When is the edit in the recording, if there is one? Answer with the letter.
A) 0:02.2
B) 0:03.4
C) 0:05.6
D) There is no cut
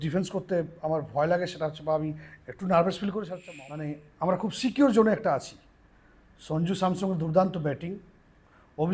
B